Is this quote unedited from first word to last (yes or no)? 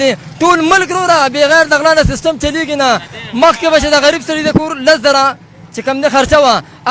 yes